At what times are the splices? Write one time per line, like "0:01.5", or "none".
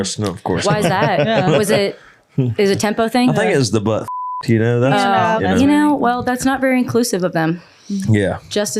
0:05.4